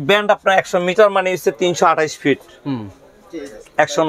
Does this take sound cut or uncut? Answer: uncut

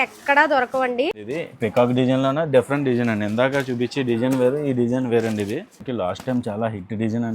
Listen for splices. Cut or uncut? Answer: cut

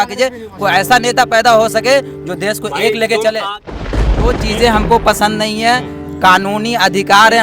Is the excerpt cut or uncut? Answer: cut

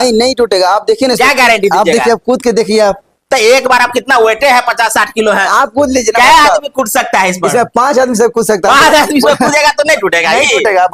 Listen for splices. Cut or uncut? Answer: uncut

